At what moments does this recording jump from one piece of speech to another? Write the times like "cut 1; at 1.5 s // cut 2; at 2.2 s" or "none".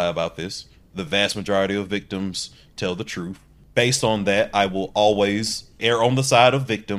cut 1; at 3.5 s // cut 2; at 5.7 s